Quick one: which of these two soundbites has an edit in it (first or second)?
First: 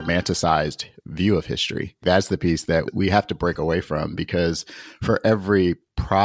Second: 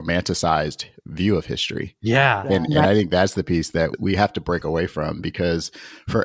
first